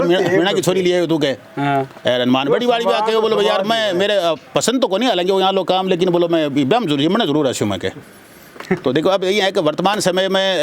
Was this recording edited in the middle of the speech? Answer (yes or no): no